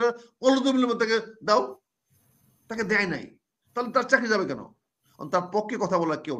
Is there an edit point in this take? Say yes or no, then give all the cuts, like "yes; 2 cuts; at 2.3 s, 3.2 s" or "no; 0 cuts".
no; 0 cuts